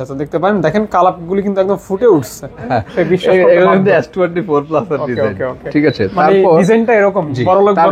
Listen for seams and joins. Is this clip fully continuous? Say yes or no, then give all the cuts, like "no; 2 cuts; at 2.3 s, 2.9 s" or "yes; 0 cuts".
no; 1 cut; at 2.7 s